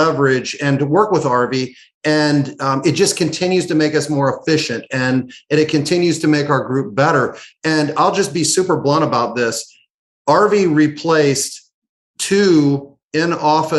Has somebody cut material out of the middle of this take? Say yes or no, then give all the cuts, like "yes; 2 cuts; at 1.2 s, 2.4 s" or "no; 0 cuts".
no; 0 cuts